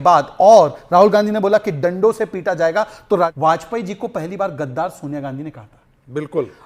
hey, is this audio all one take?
no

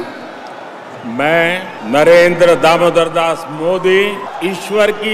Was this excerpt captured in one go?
no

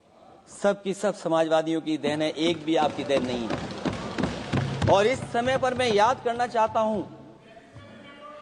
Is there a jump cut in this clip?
no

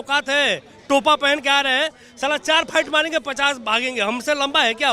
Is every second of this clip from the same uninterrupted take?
yes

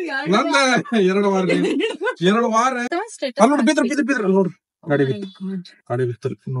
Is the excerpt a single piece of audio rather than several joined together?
no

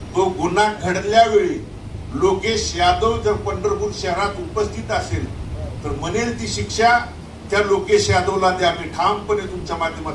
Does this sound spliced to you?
no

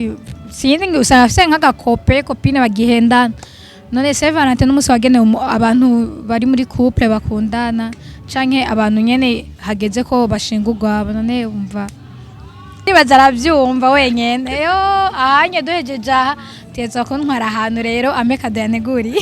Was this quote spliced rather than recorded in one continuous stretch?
yes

